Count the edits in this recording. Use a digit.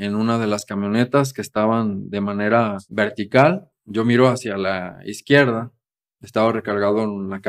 2